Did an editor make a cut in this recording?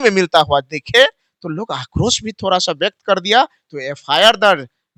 no; 0 cuts

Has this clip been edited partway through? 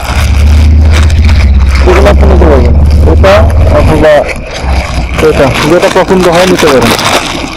no; 0 cuts

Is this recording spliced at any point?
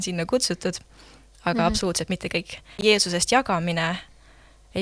yes; 1 cut; at 2.6 s

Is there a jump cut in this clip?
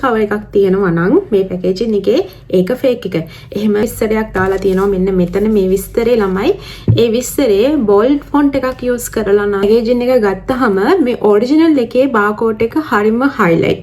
yes; 2 cuts; at 3.8 s, 9.6 s

